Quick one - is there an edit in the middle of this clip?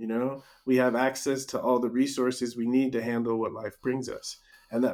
no; 0 cuts

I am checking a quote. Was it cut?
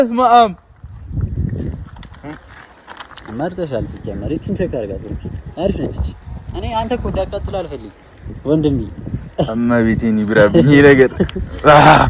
no; 0 cuts

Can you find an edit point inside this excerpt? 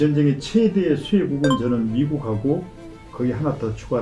no; 0 cuts

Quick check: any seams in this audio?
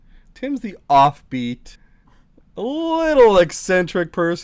no; 0 cuts

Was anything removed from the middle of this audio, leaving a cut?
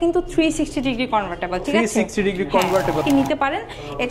yes; 1 cut; at 3.0 s

